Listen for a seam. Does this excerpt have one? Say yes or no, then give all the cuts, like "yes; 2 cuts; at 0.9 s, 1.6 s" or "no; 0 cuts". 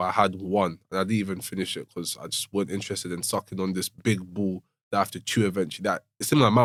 no; 0 cuts